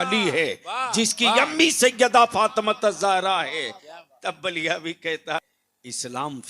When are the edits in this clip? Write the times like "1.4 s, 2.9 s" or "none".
5.5 s